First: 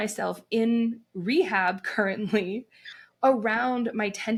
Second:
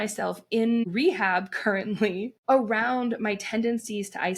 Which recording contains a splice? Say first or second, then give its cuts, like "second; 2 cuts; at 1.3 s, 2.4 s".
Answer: second; 2 cuts; at 0.8 s, 2.3 s